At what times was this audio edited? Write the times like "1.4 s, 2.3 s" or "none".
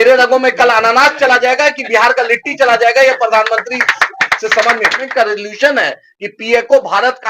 5.1 s